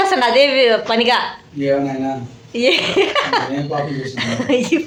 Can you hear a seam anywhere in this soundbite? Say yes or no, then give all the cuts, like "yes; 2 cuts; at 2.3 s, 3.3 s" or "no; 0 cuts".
no; 0 cuts